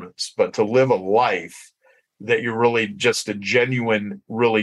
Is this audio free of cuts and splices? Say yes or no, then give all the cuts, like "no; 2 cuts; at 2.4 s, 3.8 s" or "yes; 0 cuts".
yes; 0 cuts